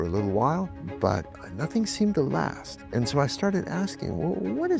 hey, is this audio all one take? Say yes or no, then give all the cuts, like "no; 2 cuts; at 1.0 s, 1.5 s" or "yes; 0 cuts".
yes; 0 cuts